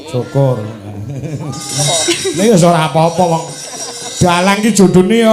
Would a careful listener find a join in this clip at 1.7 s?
yes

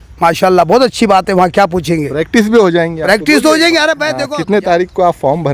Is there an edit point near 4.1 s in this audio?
yes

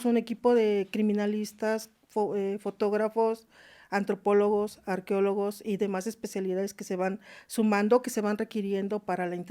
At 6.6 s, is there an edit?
no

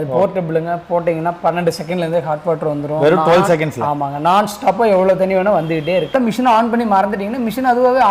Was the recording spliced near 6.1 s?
yes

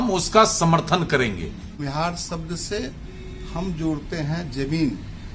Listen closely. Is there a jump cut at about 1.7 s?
yes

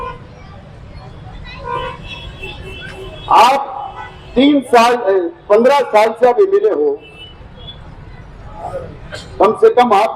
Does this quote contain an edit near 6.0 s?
no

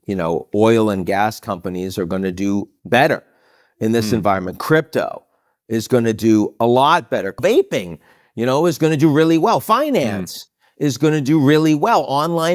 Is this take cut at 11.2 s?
no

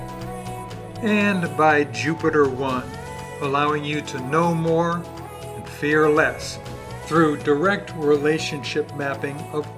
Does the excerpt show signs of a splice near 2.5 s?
no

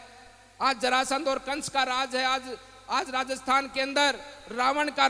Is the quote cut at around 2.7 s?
no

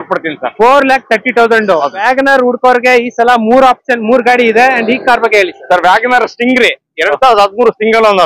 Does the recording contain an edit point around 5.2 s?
no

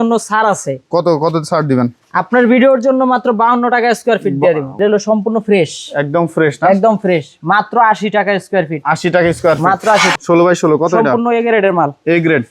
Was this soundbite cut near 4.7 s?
yes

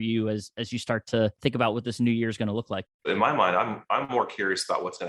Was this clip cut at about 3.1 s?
yes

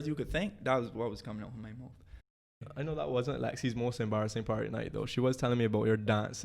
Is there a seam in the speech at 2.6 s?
yes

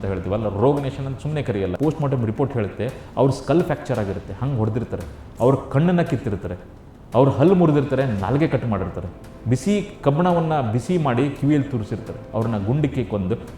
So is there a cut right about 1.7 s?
yes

